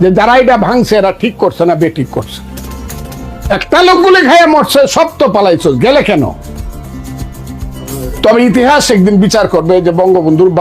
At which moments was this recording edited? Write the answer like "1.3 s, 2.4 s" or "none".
6.9 s